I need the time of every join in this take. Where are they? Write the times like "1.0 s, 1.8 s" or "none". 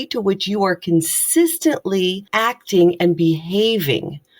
2.2 s